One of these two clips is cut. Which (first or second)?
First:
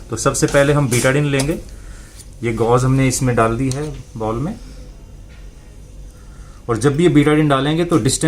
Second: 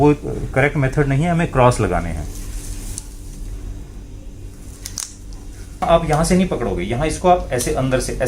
second